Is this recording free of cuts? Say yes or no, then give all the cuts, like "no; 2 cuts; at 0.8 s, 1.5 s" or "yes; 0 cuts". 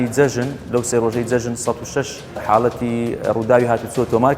no; 1 cut; at 2.4 s